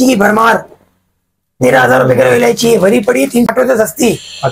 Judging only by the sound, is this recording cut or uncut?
cut